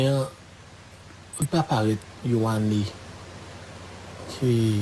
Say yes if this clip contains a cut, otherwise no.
yes